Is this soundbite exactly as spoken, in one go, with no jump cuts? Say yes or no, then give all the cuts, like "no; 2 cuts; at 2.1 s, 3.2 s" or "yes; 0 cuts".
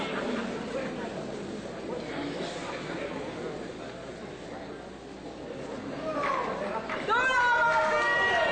yes; 0 cuts